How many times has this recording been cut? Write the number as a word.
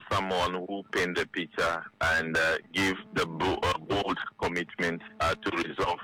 zero